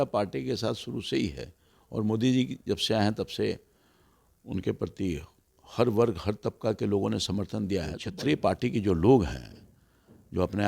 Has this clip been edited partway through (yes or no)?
yes